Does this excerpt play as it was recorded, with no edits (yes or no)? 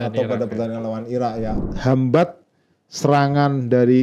no